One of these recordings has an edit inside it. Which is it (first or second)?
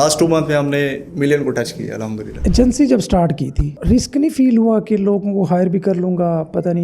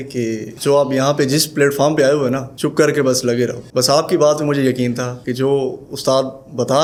first